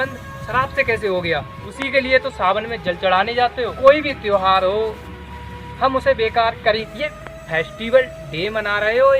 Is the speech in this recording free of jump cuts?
no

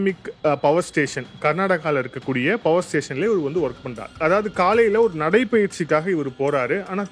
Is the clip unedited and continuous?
yes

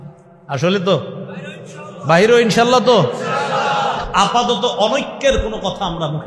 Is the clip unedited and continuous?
no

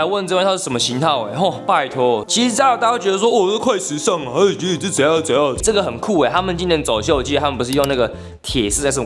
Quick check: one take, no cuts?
no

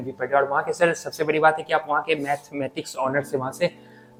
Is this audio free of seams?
yes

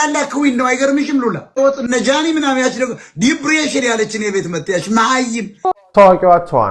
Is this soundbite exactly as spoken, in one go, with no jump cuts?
no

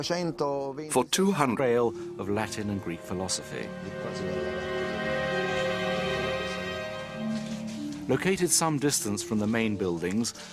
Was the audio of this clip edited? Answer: no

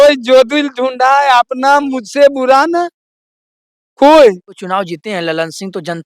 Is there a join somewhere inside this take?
yes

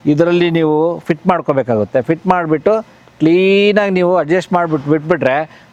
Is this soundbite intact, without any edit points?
yes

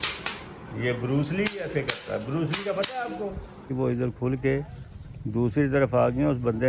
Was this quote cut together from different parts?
yes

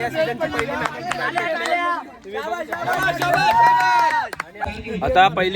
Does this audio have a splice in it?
yes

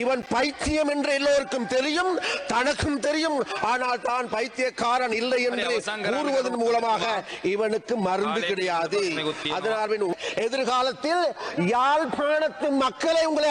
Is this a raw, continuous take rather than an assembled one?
no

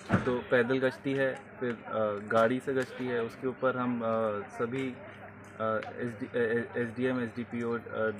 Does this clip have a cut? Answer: no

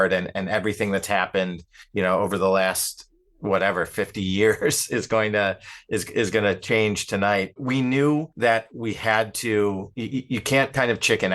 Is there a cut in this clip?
yes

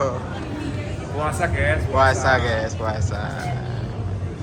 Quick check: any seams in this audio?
no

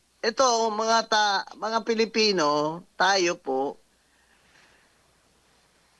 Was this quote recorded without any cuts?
yes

